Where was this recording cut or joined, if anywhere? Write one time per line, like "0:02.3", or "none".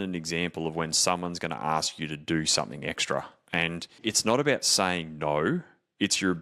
0:04.0

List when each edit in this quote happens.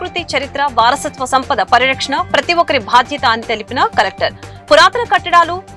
none

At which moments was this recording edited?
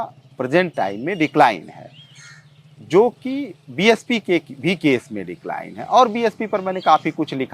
none

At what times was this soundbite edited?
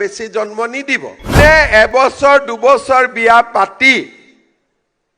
0:01.3

